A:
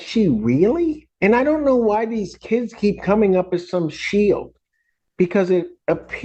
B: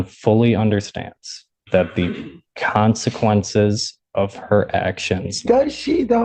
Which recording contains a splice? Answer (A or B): A